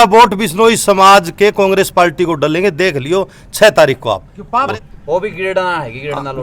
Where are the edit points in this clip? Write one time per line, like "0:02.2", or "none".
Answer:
0:04.7